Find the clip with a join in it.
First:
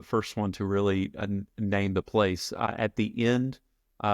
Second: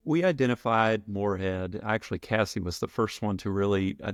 first; 1 cut; at 2.7 s

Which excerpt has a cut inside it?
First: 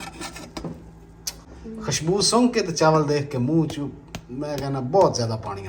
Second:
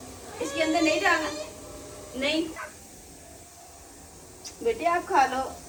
first; 1 cut; at 1.5 s

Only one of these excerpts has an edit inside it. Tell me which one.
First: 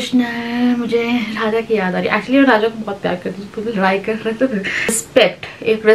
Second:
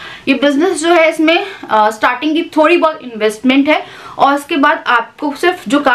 first; 1 cut; at 5.0 s

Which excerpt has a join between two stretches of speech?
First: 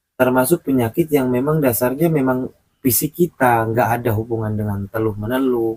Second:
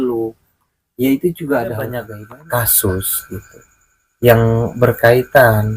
second; 1 cut; at 2.1 s

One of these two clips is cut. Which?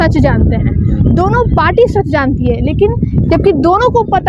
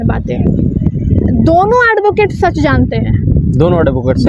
first; 1 cut; at 3.2 s

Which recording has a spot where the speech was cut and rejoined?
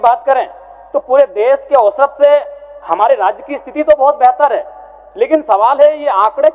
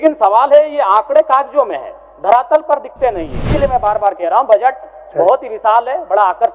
second; 1 cut; at 3.4 s

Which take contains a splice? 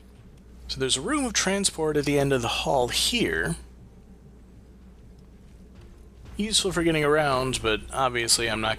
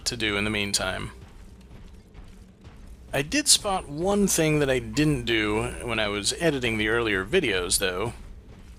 first; 1 cut; at 1.0 s

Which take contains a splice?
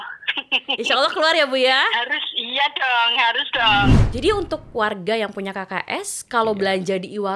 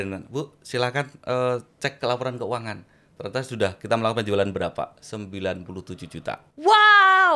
first; 1 cut; at 3.9 s

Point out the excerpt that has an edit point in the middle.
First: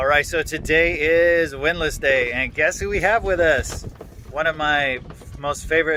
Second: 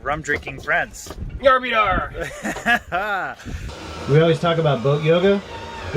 second; 1 cut; at 3.8 s

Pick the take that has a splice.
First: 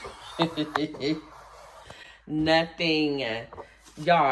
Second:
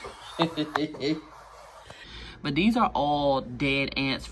second; 1 cut; at 2.1 s

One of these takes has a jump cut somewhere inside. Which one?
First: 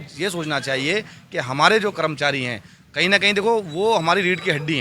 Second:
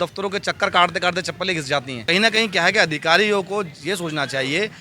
second; 1 cut; at 2.0 s

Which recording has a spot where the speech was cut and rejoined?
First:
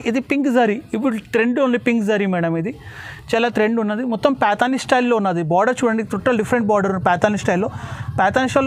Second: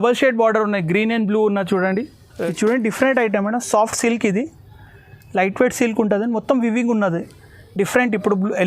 second; 1 cut; at 2.2 s

